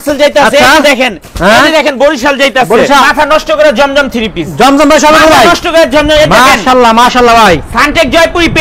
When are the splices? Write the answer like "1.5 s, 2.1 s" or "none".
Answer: 3.0 s